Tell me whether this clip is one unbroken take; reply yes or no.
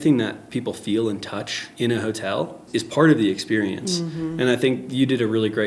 yes